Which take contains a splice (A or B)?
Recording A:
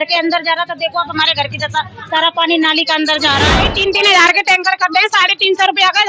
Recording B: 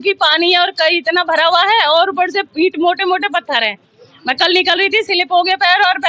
A